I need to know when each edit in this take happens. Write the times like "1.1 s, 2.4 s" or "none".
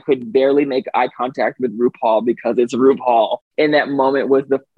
3.5 s